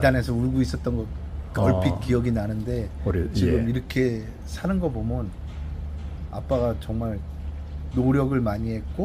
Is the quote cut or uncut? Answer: uncut